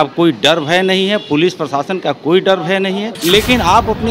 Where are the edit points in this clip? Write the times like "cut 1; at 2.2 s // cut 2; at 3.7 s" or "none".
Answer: cut 1; at 3.1 s